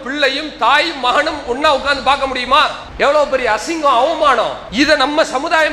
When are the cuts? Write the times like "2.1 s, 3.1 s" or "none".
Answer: 2.8 s, 4.6 s